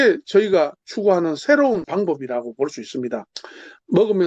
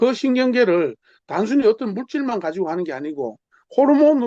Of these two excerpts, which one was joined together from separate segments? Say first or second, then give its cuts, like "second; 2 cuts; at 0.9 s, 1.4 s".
first; 1 cut; at 1.9 s